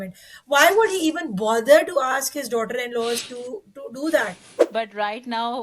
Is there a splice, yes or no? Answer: yes